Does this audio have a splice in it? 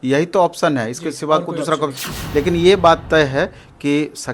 yes; 1 cut; at 2.1 s

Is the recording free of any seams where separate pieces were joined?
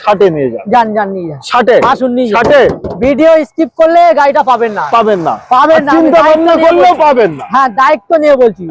yes; 0 cuts

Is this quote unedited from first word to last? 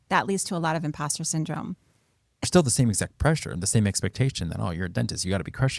no; 1 cut; at 2.4 s

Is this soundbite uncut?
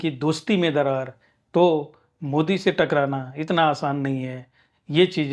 yes; 0 cuts

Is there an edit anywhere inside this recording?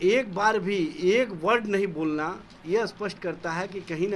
no; 0 cuts

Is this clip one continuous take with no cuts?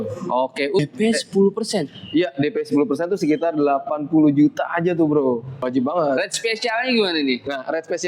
no; 2 cuts; at 0.8 s, 5.5 s

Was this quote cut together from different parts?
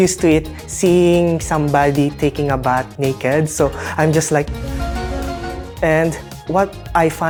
no; 0 cuts

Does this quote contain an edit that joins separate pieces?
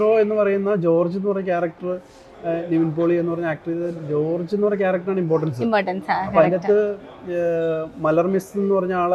no; 0 cuts

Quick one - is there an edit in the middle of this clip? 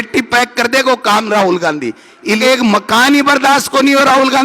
yes; 1 cut; at 2.4 s

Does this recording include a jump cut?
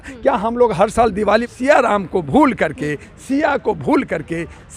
yes; 1 cut; at 1.5 s

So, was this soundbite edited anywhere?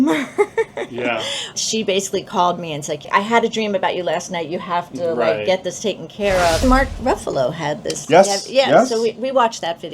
yes; 3 cuts; at 1.5 s, 3.1 s, 6.6 s

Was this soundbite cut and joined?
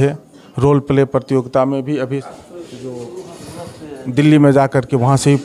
yes; 1 cut; at 2.3 s

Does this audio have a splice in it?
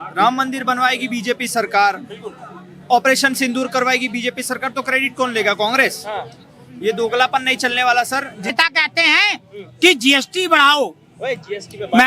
yes; 1 cut; at 8.5 s

